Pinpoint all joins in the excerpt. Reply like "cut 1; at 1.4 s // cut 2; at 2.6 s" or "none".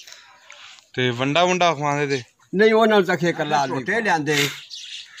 cut 1; at 3.8 s